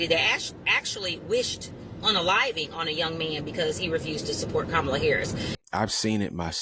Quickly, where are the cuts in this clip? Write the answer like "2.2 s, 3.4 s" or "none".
5.5 s